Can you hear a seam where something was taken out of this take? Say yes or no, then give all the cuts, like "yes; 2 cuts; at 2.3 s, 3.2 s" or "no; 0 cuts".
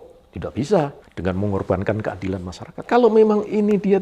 yes; 2 cuts; at 1.1 s, 2.8 s